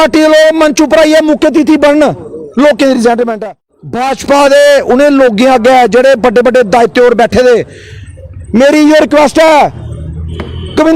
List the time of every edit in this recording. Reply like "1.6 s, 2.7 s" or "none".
3.3 s